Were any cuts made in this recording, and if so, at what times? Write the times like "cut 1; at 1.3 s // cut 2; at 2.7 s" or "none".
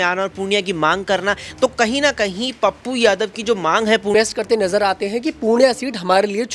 cut 1; at 4.1 s